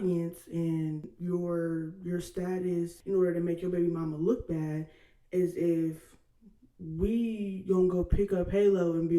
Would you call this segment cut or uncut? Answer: cut